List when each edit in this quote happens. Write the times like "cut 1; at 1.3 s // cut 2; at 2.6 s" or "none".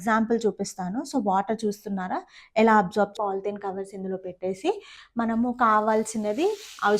cut 1; at 3.1 s